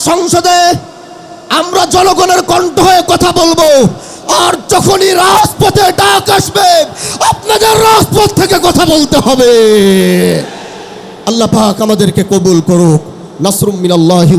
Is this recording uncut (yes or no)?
yes